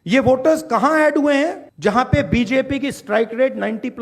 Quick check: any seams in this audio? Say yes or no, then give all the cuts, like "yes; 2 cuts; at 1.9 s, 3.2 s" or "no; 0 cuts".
yes; 1 cut; at 1.7 s